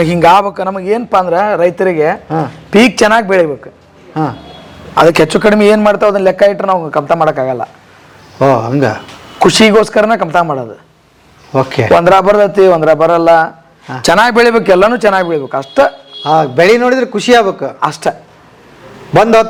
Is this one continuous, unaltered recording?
yes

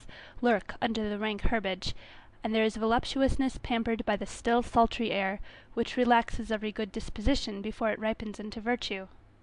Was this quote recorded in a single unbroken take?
yes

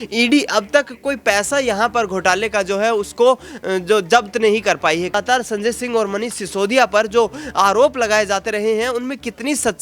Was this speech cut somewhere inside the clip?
yes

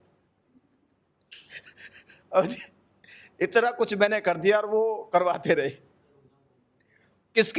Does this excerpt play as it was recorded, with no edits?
yes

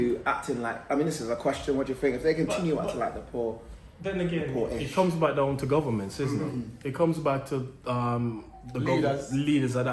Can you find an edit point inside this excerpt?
no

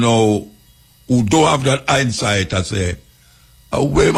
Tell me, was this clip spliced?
no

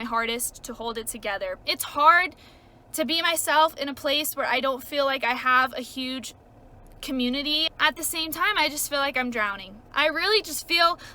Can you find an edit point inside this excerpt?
yes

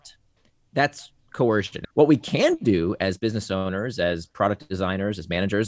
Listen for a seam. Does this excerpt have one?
yes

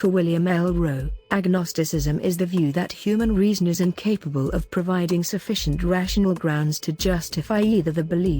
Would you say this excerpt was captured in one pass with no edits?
no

